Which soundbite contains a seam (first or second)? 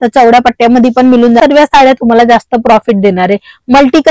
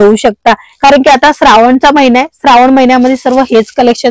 first